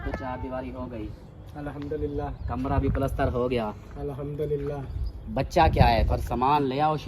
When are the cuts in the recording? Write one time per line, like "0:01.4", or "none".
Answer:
none